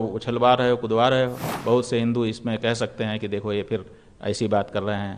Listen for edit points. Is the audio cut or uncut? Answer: cut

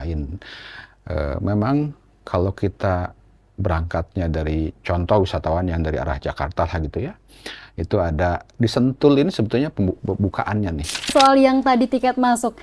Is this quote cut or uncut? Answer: cut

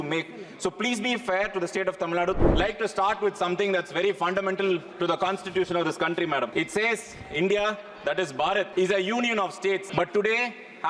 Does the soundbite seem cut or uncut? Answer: cut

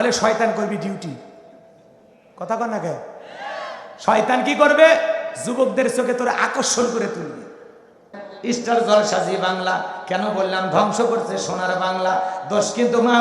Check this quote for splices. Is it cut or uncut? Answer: cut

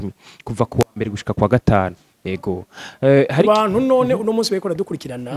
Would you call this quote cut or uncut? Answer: uncut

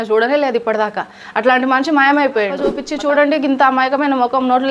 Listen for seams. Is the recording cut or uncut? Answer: cut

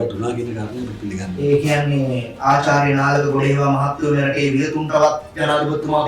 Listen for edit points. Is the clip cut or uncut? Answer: uncut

